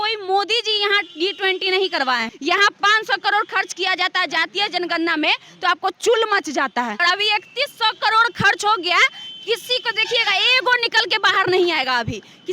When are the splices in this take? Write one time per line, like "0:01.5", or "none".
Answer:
0:02.3
0:07.0